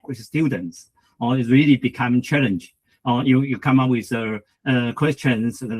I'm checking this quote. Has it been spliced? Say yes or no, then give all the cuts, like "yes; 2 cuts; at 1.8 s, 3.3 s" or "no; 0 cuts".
no; 0 cuts